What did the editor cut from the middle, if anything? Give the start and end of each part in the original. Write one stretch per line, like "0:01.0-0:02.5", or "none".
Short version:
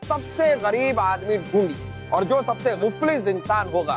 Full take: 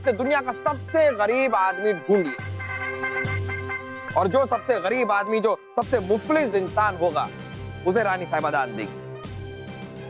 0:02.5-0:03.9
0:04.8-0:06.0